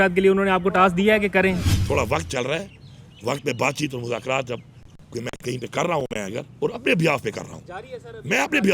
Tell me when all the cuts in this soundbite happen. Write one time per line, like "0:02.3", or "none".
0:01.7